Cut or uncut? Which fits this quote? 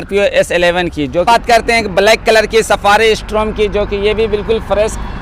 cut